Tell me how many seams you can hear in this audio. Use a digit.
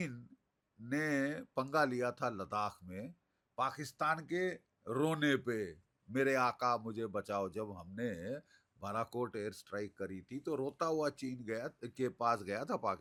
0